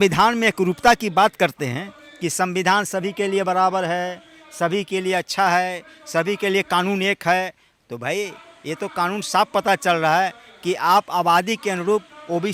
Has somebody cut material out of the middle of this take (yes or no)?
no